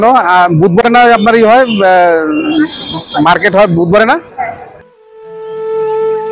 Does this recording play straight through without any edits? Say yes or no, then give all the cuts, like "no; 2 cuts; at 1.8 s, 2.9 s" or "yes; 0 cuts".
no; 1 cut; at 5.3 s